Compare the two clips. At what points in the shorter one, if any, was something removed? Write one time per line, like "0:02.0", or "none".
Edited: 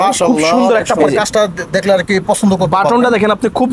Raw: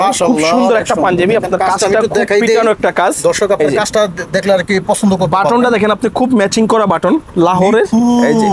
0:01.0